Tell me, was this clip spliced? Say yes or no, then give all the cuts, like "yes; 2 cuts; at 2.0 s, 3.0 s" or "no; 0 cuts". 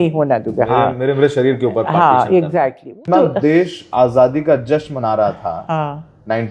yes; 1 cut; at 3.1 s